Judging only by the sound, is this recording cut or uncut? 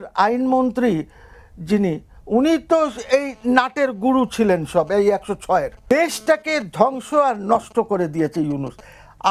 cut